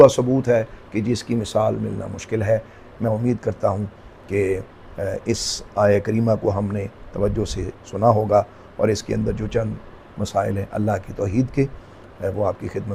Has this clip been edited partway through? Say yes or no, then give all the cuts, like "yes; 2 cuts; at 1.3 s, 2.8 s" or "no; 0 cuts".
no; 0 cuts